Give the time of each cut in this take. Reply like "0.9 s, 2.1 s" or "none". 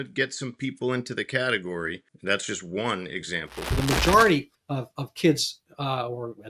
2.1 s, 3.8 s, 4.6 s